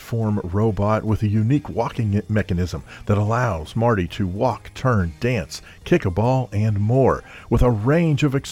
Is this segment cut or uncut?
uncut